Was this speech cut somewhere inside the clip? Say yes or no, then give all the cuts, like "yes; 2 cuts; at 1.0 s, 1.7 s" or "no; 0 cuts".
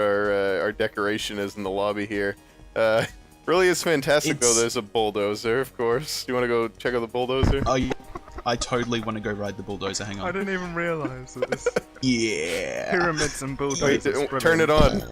yes; 1 cut; at 1.2 s